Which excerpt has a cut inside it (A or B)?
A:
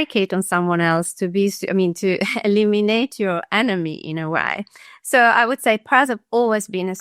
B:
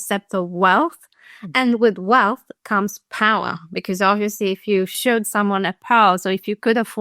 B